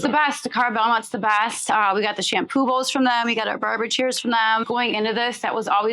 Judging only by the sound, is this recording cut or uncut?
cut